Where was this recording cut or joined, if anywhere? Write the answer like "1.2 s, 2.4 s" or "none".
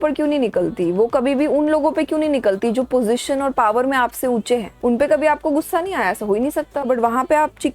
4.7 s, 6.8 s